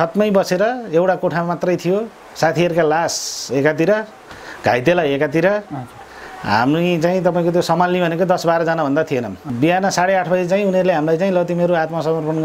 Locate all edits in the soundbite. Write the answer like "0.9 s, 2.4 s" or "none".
9.5 s